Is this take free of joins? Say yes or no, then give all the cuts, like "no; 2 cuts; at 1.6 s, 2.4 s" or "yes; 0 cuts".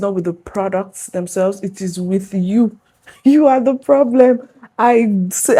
yes; 0 cuts